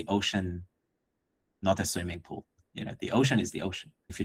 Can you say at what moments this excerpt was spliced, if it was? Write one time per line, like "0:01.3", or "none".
none